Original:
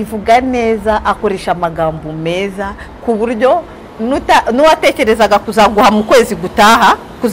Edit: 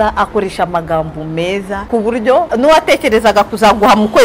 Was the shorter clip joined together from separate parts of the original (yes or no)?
yes